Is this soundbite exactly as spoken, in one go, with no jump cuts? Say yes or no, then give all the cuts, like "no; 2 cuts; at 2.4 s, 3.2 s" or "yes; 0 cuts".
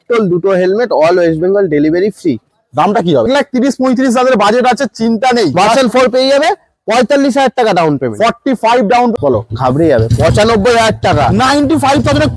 no; 2 cuts; at 3.2 s, 9.1 s